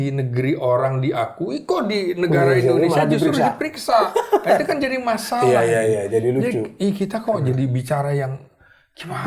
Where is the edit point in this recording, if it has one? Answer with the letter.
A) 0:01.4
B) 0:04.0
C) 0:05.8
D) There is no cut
D